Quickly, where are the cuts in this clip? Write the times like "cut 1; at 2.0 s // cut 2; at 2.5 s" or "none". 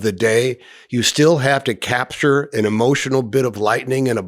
none